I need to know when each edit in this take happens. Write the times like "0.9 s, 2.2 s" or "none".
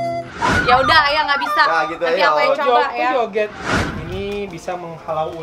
3.9 s